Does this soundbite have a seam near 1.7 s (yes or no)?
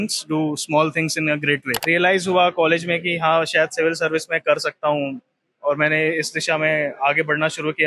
yes